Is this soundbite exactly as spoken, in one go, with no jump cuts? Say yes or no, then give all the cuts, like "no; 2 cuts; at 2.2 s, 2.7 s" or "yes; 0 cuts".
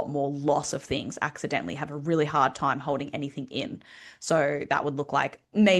yes; 0 cuts